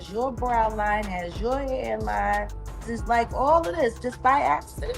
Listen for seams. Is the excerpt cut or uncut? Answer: cut